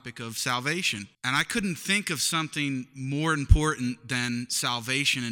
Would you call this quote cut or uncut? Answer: cut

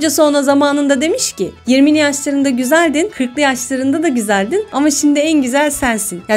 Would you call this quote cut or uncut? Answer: uncut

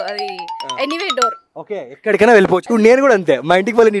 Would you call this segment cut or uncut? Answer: cut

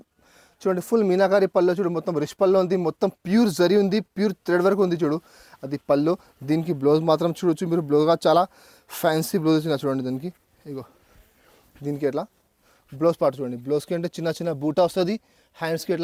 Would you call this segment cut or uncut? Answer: uncut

